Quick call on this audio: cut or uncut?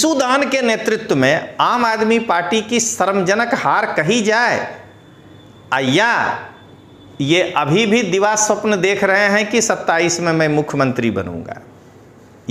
uncut